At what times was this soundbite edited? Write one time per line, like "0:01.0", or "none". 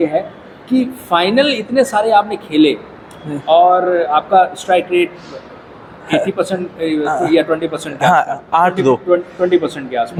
none